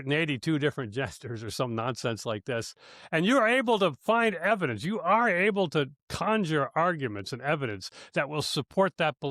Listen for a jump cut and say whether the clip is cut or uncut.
uncut